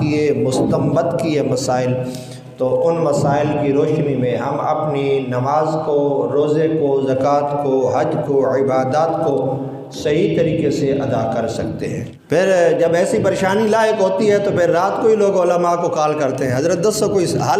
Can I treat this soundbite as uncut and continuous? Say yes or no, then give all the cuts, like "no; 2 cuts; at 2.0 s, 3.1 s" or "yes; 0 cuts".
no; 1 cut; at 12.1 s